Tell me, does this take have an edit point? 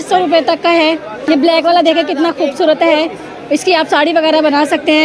yes; 1 cut; at 1.2 s

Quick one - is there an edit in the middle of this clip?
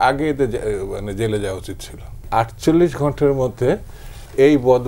yes; 1 cut; at 2.3 s

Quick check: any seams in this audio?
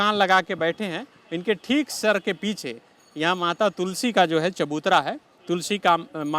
no; 0 cuts

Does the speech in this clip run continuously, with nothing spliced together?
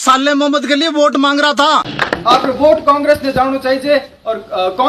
no; 1 cut; at 2.1 s

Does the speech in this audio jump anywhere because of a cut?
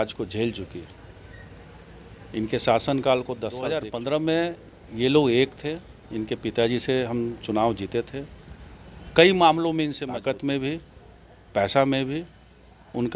yes; 2 cuts; at 3.7 s, 10.1 s

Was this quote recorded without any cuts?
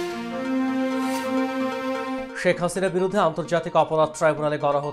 no; 1 cut; at 2.2 s

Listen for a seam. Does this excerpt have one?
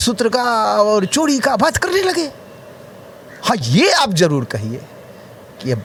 no; 0 cuts

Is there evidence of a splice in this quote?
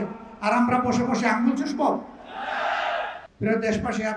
yes; 1 cut; at 3.2 s

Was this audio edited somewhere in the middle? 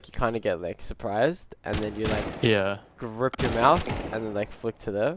no; 0 cuts

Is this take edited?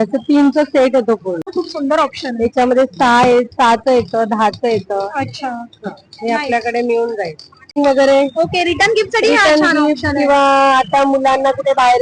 yes; 2 cuts; at 1.5 s, 7.8 s

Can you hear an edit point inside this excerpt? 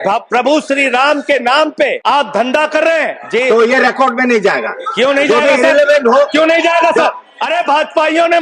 yes; 3 cuts; at 2.0 s, 3.2 s, 7.3 s

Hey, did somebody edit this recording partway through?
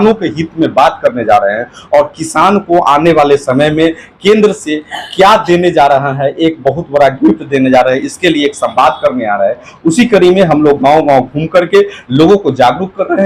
no; 0 cuts

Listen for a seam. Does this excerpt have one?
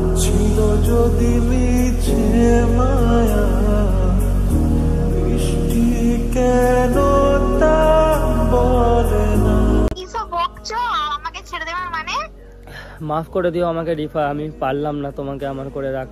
no; 0 cuts

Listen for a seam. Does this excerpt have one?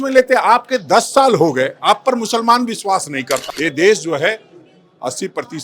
yes; 1 cut; at 3.5 s

